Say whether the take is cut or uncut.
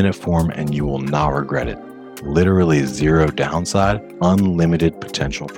cut